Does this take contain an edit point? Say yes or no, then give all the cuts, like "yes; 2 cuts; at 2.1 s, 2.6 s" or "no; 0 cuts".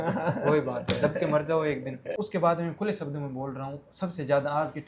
yes; 1 cut; at 2.1 s